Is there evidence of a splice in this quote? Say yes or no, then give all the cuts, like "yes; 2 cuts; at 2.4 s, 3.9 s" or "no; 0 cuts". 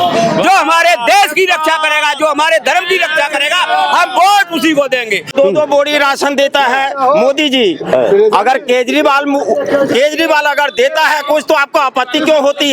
yes; 1 cut; at 5.3 s